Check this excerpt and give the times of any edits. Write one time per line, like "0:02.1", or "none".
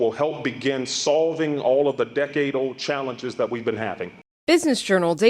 0:04.1